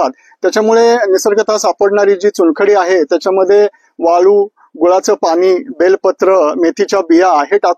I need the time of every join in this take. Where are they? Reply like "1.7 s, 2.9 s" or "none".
none